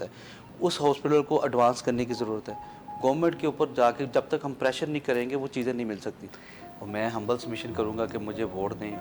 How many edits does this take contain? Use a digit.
1